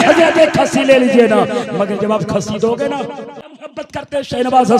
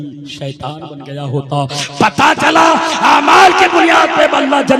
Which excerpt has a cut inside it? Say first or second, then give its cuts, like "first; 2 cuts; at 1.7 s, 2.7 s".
first; 1 cut; at 3.4 s